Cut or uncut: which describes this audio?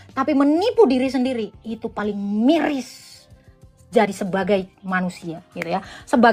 uncut